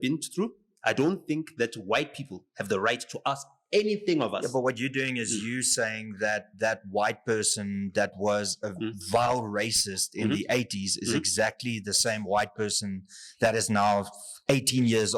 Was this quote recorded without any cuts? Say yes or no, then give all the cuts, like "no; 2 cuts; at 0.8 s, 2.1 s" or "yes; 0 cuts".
yes; 0 cuts